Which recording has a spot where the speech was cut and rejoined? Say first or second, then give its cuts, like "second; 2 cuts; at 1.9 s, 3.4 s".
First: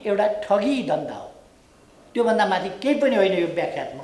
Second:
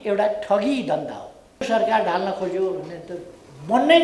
second; 1 cut; at 1.6 s